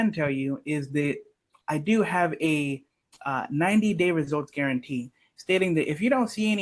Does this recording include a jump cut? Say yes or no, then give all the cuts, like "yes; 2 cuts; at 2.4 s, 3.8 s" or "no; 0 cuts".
no; 0 cuts